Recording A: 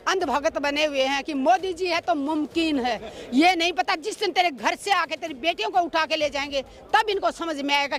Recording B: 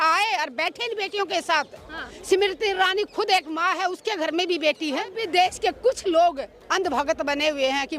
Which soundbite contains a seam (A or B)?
B